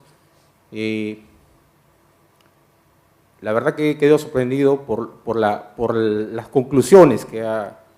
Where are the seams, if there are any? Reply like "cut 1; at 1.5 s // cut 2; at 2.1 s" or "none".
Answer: cut 1; at 5.9 s